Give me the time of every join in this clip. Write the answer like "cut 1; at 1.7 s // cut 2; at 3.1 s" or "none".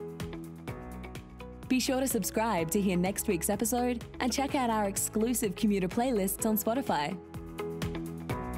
cut 1; at 1.6 s // cut 2; at 7.3 s